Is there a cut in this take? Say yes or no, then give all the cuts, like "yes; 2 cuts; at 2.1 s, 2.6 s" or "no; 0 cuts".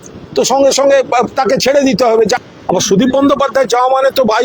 yes; 1 cut; at 2.4 s